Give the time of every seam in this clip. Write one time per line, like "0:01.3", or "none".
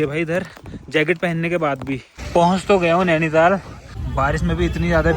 0:02.1
0:03.8